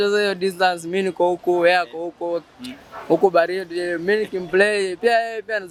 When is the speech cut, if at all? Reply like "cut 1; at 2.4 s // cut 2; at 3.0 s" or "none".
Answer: none